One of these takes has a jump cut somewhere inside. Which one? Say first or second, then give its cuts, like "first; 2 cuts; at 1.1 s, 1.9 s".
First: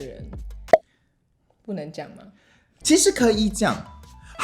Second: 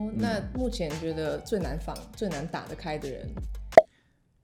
first; 1 cut; at 2.8 s